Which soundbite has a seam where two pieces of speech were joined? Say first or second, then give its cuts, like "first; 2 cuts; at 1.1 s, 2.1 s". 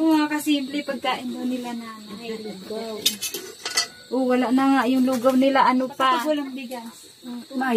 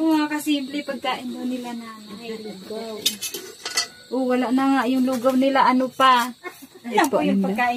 first; 1 cut; at 6.3 s